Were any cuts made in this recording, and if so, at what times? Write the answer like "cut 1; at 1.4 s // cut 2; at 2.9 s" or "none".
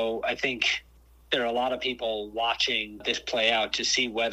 cut 1; at 3.0 s